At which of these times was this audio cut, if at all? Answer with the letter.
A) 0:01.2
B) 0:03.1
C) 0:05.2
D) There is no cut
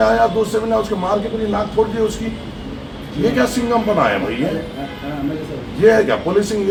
D